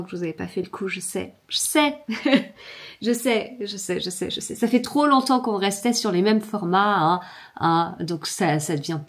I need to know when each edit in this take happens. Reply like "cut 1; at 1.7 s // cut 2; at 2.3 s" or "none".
none